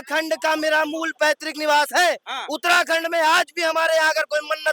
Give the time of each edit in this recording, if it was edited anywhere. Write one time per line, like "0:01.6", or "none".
none